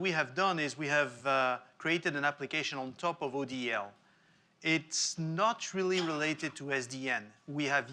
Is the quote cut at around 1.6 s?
no; 0 cuts

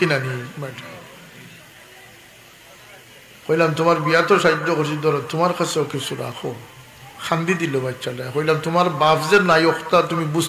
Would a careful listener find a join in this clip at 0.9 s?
no; 0 cuts

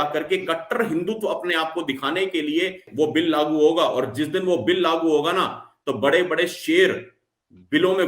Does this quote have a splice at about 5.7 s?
no; 1 cut; at 2.8 s

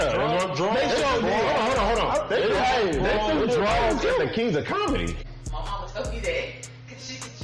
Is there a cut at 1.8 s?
no; 1 cut; at 5.2 s

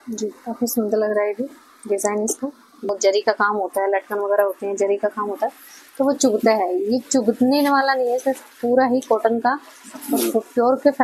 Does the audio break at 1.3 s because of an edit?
no; 1 cut; at 2.9 s

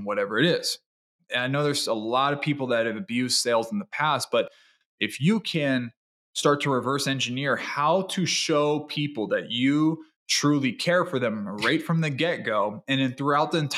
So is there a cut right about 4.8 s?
no; 1 cut; at 1.2 s

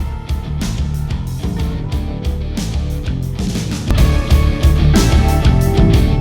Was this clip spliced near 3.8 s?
yes; 1 cut; at 3.8 s

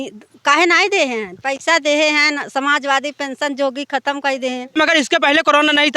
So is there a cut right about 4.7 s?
yes; 1 cut; at 4.7 s

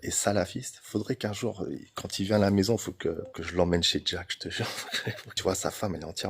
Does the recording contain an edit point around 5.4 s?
yes; 1 cut; at 5.4 s

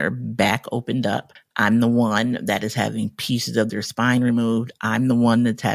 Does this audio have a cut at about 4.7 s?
no; 1 cut; at 1.4 s

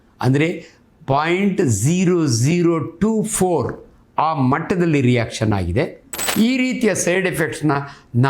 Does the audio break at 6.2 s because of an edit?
yes; 1 cut; at 6.2 s

